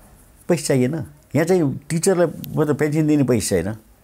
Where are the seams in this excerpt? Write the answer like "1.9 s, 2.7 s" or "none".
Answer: 1.1 s